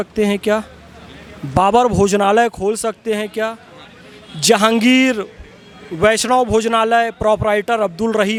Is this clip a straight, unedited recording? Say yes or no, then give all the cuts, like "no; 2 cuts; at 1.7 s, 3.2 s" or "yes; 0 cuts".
yes; 0 cuts